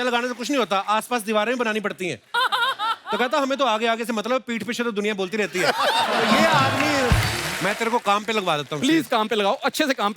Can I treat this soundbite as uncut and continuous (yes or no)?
no